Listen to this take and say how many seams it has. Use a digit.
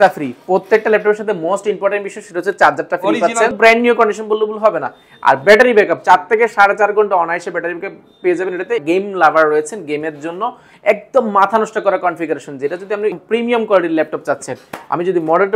3